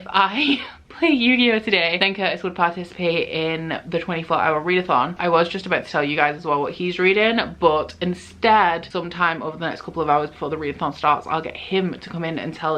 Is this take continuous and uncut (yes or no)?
yes